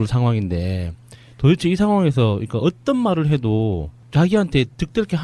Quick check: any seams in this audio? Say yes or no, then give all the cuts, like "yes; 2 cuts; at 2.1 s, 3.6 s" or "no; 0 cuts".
no; 0 cuts